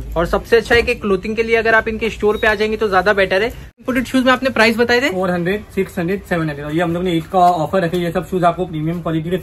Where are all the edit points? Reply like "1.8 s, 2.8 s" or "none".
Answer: 3.8 s